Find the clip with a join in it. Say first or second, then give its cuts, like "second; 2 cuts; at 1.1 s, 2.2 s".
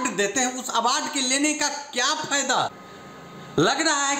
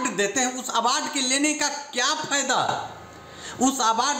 first; 1 cut; at 2.7 s